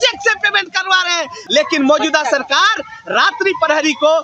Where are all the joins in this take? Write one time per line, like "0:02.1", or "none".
0:01.4